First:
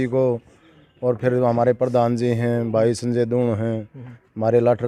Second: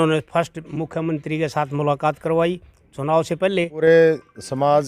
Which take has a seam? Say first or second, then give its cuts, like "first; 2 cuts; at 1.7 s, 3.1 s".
second; 1 cut; at 3.8 s